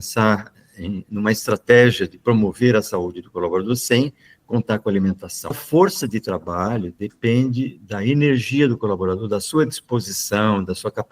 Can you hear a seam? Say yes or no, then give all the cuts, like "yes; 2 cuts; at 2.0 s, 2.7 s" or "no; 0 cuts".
yes; 1 cut; at 5.6 s